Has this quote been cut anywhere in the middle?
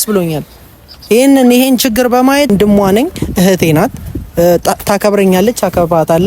yes; 1 cut; at 2.5 s

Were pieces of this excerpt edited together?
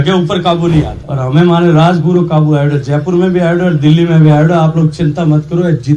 yes; 1 cut; at 1.0 s

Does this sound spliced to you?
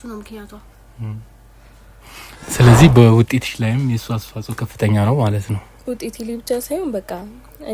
yes; 1 cut; at 2.4 s

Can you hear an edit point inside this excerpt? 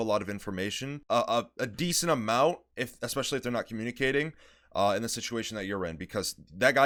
no; 0 cuts

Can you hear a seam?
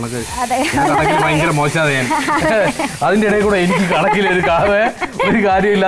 no; 0 cuts

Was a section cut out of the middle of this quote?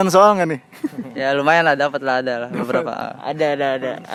no; 0 cuts

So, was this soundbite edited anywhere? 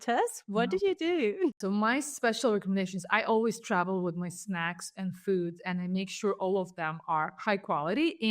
yes; 1 cut; at 1.5 s

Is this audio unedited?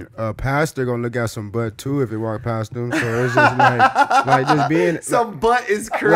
yes; 0 cuts

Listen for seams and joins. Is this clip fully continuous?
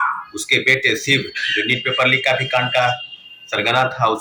yes; 0 cuts

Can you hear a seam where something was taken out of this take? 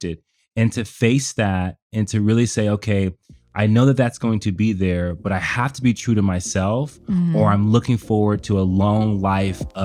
no; 0 cuts

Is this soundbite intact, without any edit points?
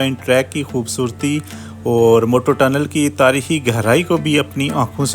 yes; 0 cuts

